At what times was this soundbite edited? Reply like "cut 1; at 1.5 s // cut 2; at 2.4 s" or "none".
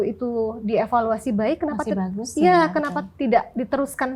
none